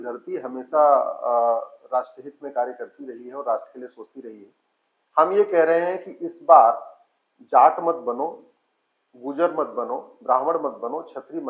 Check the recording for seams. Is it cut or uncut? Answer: uncut